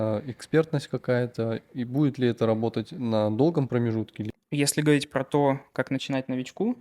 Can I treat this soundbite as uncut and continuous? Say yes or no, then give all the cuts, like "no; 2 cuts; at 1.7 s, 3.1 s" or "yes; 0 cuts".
no; 1 cut; at 4.2 s